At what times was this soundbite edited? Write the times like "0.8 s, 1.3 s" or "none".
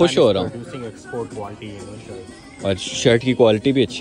none